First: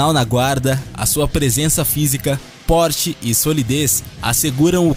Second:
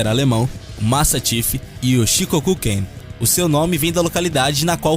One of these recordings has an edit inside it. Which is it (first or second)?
second